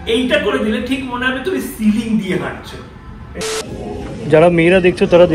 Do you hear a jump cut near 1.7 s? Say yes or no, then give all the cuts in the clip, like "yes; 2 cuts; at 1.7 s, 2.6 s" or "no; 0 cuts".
no; 1 cut; at 3.4 s